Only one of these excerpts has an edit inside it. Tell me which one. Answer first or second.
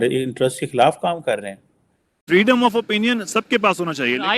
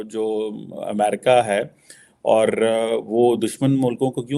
first